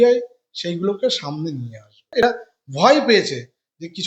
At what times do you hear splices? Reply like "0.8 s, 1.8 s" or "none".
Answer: 2.2 s